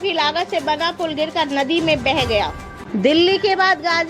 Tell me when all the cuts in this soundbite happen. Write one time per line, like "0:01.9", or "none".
0:02.9